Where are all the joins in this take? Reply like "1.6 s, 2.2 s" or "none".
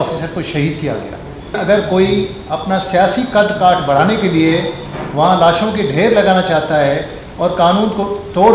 1.6 s